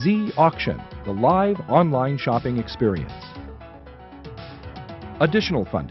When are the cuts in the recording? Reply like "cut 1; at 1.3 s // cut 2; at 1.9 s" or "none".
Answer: cut 1; at 3.1 s // cut 2; at 5.0 s